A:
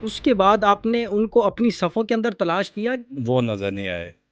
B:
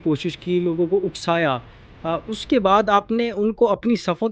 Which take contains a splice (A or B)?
A